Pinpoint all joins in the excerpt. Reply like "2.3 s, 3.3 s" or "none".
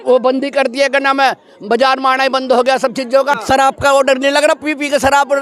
3.4 s